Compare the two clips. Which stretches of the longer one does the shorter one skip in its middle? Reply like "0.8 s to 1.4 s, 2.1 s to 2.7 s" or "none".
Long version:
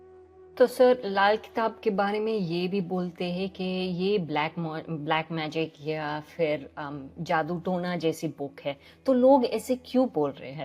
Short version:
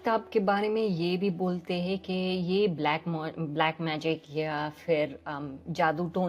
none